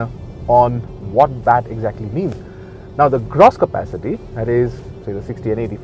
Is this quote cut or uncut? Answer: uncut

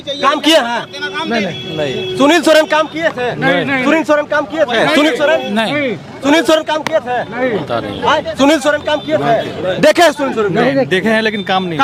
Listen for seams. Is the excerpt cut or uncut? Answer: uncut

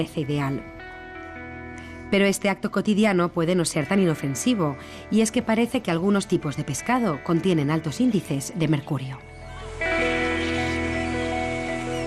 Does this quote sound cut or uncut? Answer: uncut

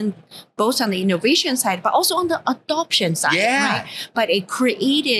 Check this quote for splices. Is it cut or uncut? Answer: uncut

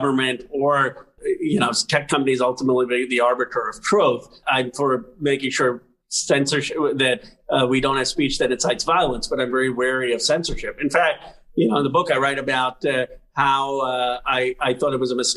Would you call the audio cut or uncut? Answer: cut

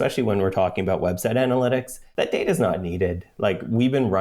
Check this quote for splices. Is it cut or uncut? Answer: cut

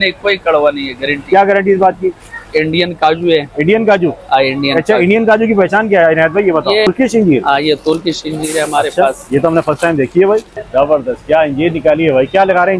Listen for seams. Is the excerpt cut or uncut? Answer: cut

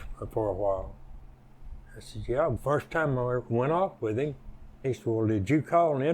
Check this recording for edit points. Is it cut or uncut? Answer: cut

